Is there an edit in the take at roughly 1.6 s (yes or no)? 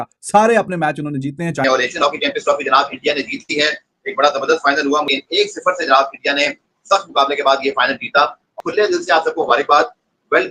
yes